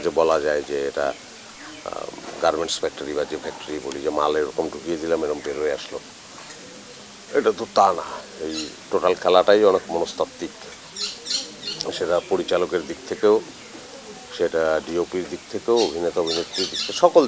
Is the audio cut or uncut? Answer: uncut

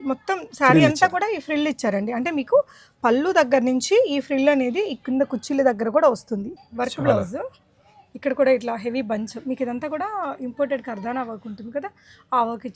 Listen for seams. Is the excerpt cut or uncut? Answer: cut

